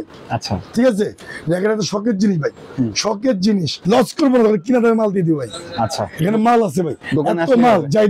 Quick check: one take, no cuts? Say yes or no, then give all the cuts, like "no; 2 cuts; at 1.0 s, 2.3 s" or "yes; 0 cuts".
no; 1 cut; at 3.8 s